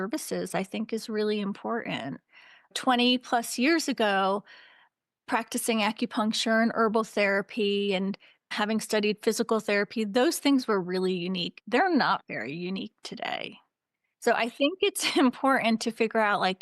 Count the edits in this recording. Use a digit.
3